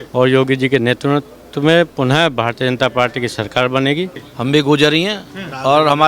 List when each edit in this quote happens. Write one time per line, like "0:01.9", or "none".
0:04.2